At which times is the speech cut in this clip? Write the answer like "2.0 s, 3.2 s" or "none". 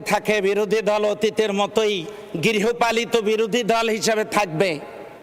none